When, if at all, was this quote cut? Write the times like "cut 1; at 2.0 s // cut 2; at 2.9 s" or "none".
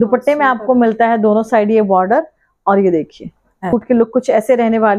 cut 1; at 3.7 s